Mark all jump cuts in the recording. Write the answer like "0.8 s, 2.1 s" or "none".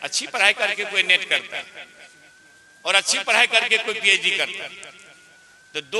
none